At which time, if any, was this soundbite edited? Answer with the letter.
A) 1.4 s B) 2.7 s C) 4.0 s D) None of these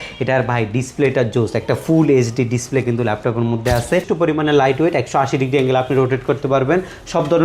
C